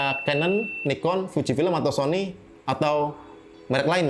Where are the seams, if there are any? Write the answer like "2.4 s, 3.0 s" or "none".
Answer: none